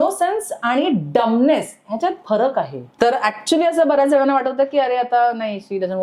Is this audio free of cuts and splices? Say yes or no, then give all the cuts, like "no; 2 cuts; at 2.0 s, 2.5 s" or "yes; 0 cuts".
no; 1 cut; at 2.8 s